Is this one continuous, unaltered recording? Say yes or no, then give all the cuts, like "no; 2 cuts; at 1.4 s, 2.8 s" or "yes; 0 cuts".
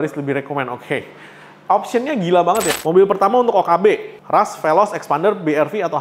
no; 1 cut; at 2.7 s